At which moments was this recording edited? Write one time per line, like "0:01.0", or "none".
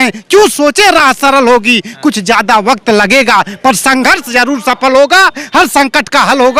none